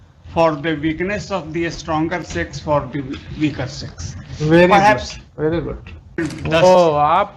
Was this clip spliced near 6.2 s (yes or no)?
yes